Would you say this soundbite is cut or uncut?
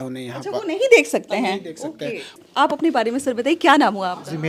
uncut